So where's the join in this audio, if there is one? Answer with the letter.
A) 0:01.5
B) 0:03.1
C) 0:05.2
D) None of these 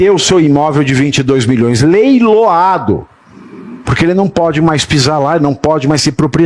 D